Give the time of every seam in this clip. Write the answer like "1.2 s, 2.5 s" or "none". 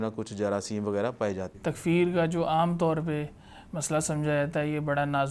1.5 s